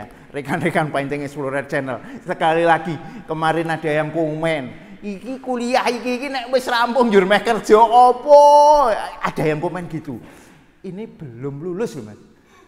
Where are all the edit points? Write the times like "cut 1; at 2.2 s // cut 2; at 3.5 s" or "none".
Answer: none